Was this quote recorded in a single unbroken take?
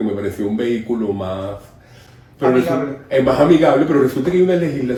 yes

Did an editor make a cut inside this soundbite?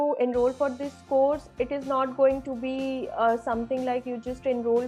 no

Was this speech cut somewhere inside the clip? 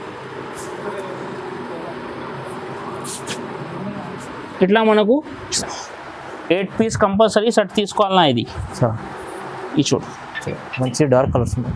yes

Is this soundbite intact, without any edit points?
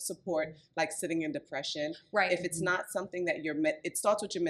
yes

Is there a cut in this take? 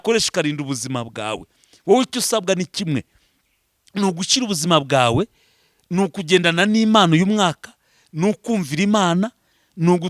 no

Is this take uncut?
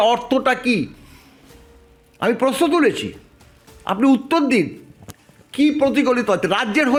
yes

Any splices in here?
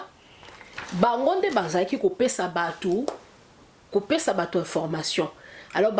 no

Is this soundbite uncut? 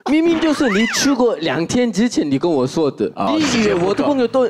no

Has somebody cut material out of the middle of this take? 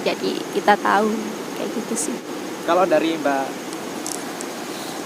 yes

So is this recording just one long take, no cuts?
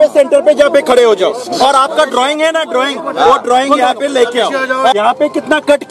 no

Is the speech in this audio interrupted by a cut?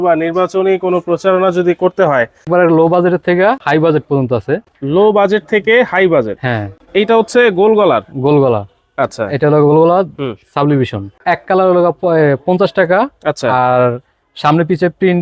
yes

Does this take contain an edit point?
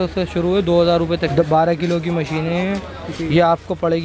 yes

